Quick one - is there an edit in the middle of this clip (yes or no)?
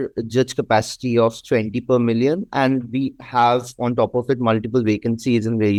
no